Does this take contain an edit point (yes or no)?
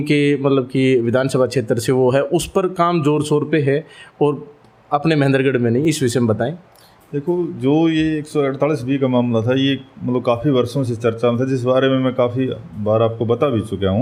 no